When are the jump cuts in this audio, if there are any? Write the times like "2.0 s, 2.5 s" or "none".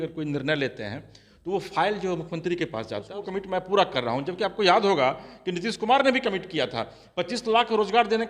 3.2 s

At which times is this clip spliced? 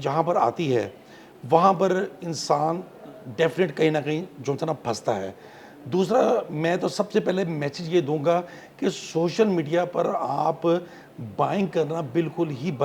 none

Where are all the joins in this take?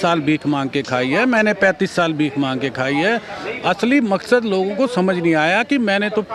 none

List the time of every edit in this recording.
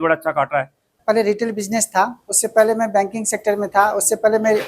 0.9 s

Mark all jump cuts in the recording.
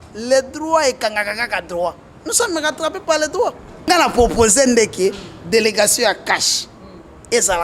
3.9 s

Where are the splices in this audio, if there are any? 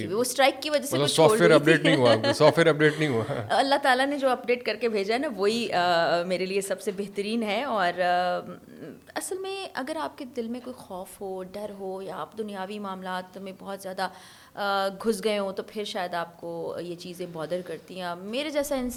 none

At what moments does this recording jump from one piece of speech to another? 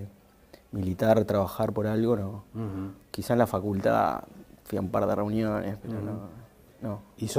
none

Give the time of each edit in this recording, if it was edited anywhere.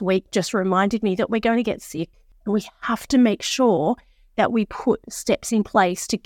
2.3 s

